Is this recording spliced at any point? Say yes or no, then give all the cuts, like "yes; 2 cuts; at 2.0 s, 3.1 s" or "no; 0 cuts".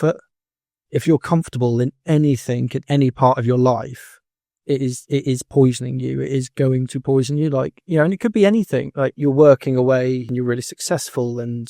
yes; 2 cuts; at 9.1 s, 10.3 s